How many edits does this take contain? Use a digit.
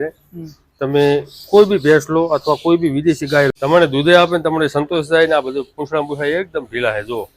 1